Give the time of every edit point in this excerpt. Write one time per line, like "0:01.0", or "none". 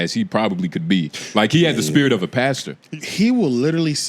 0:02.7